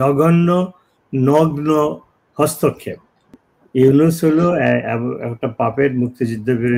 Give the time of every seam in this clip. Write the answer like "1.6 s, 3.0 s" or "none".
3.4 s